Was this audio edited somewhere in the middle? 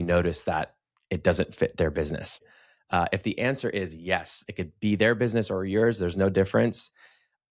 yes; 1 cut; at 2.4 s

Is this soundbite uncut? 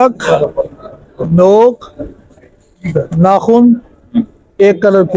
yes; 0 cuts

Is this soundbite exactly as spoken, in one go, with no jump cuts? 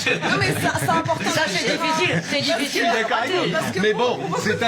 yes; 0 cuts

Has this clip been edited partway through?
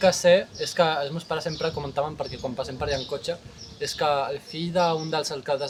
no; 0 cuts

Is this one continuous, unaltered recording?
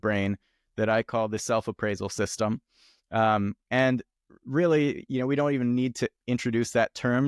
yes; 0 cuts

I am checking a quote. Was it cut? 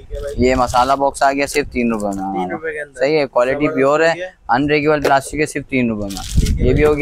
no; 0 cuts

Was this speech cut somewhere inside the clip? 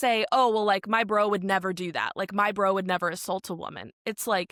no; 0 cuts

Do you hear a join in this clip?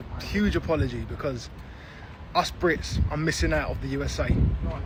no; 0 cuts

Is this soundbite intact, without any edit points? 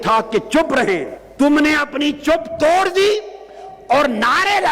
no; 1 cut; at 1.2 s

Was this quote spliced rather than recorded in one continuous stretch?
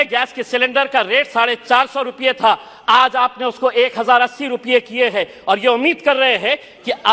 no; 0 cuts

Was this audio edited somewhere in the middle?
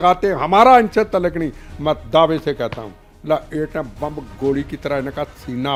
no; 0 cuts

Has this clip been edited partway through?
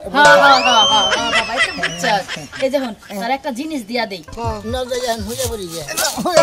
yes; 1 cut; at 4.3 s

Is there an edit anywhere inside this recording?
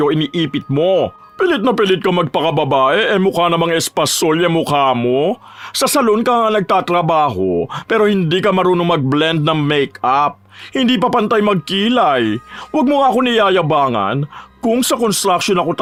no; 0 cuts

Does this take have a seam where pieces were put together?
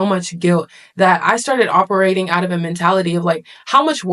no; 0 cuts

